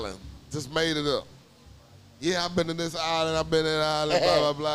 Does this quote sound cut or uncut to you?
uncut